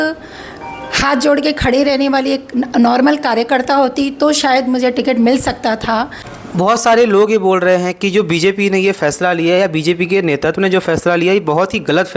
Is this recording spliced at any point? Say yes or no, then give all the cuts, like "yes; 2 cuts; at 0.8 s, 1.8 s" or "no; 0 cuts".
yes; 1 cut; at 6.2 s